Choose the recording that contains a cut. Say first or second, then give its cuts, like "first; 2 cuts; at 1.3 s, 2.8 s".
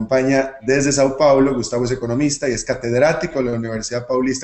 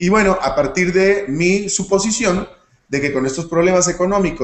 first; 1 cut; at 3.0 s